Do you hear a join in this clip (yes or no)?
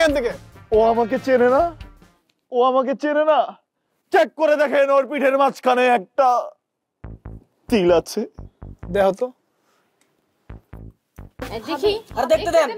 no